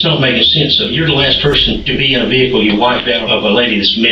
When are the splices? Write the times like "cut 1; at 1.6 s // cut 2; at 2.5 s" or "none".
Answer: cut 1; at 0.9 s // cut 2; at 1.8 s // cut 3; at 3.2 s